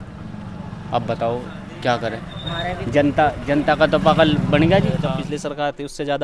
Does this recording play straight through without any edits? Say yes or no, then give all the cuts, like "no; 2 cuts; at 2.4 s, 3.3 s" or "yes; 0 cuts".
yes; 0 cuts